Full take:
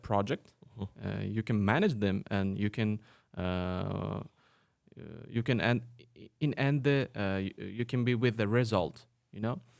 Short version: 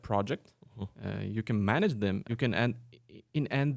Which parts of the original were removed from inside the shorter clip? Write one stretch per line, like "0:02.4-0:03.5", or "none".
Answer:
0:02.2-0:05.3